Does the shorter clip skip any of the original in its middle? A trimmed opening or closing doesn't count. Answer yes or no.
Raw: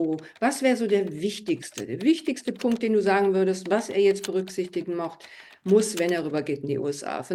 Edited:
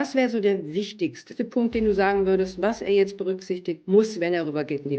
yes